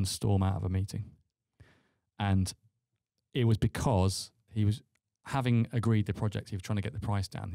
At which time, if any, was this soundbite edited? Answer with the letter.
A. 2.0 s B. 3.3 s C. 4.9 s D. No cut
D